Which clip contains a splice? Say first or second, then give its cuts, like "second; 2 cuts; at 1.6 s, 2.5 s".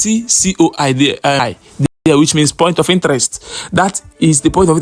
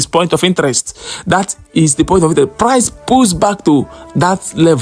first; 1 cut; at 1.5 s